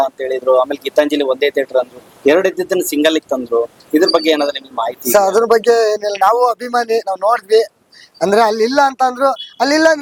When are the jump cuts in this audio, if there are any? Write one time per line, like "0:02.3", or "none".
none